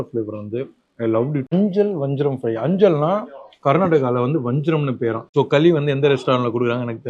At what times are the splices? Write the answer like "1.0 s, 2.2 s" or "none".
1.5 s, 5.3 s